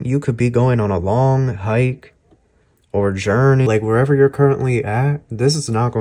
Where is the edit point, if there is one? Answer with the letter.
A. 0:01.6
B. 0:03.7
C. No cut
B